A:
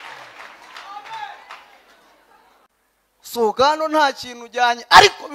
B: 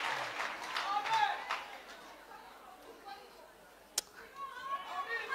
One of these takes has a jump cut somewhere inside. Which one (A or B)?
A